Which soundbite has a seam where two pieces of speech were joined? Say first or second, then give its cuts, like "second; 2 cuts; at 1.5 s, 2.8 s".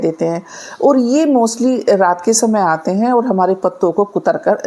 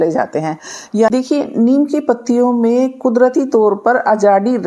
second; 1 cut; at 1.1 s